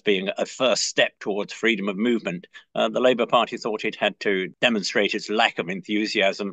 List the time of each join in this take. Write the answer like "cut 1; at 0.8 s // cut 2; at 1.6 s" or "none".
cut 1; at 4.5 s